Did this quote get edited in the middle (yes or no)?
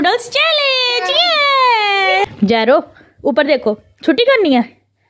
yes